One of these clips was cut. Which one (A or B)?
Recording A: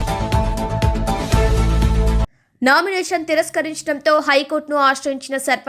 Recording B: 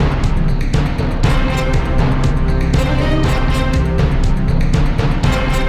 A